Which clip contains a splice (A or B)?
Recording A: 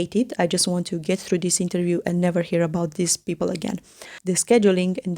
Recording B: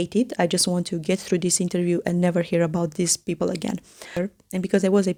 A